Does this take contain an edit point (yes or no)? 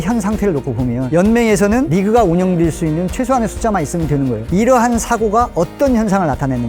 no